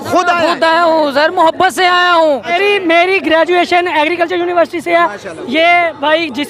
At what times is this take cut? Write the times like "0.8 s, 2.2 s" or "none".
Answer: 2.5 s